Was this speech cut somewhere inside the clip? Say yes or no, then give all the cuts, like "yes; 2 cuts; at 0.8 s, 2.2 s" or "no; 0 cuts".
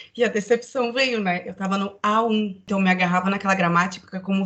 yes; 1 cut; at 2.6 s